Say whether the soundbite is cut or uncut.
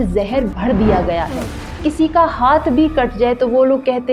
cut